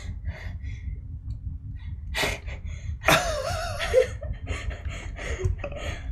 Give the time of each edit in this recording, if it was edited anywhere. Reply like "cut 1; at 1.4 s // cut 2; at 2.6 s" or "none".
cut 1; at 2.0 s